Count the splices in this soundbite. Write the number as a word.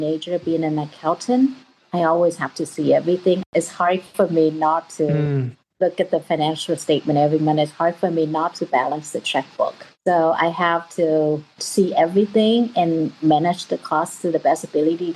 two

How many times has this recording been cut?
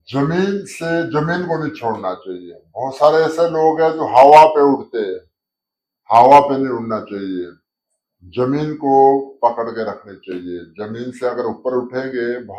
zero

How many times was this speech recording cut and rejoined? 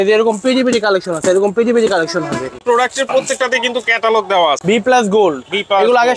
two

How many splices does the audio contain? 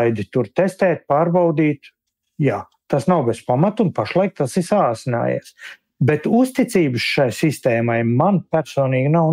one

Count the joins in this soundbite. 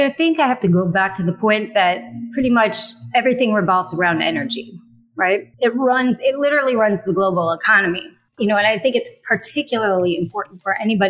one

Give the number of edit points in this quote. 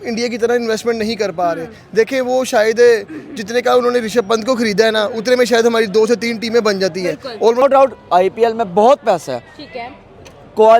one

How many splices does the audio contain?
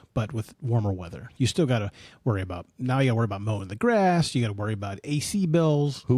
zero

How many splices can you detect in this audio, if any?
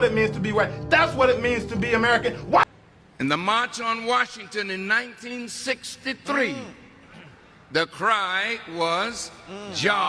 one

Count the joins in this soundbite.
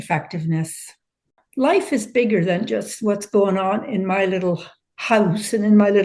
one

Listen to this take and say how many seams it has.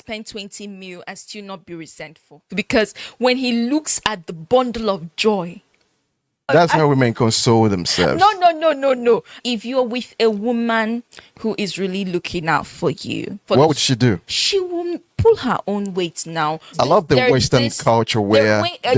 four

